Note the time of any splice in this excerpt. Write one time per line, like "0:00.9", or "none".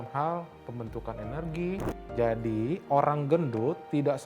0:01.9